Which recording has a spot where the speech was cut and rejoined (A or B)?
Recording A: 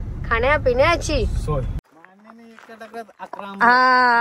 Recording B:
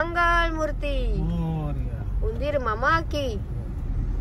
A